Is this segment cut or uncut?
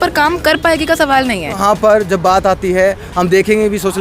cut